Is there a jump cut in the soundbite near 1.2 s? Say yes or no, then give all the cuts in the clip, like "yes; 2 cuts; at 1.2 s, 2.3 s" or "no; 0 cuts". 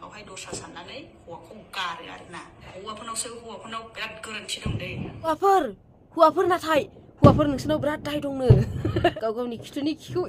no; 3 cuts; at 2.7 s, 5.3 s, 9.1 s